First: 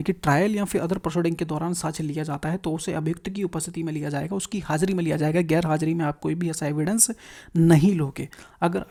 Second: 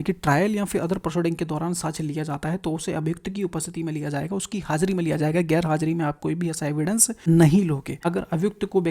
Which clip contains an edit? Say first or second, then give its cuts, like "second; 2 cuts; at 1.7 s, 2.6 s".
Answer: second; 2 cuts; at 7.1 s, 7.9 s